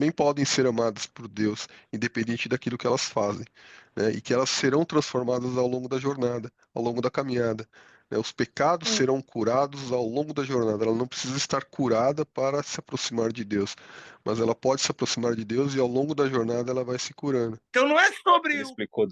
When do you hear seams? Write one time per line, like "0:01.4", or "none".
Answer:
0:17.6